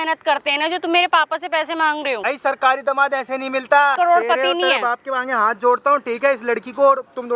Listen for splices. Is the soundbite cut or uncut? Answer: cut